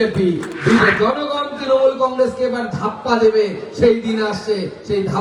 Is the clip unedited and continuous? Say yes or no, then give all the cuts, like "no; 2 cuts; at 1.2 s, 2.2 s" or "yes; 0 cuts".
no; 1 cut; at 0.9 s